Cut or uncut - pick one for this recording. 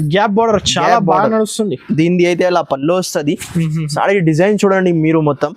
uncut